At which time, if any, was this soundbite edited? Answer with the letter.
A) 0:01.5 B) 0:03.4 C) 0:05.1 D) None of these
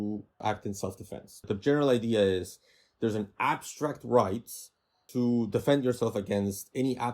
A